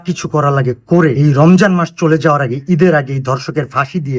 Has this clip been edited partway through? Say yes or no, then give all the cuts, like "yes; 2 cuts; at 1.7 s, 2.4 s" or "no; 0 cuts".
yes; 1 cut; at 1.2 s